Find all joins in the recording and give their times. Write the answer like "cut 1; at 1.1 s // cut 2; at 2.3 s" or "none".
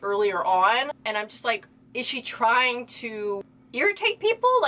cut 1; at 1.0 s // cut 2; at 3.6 s